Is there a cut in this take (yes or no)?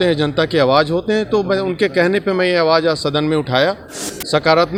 no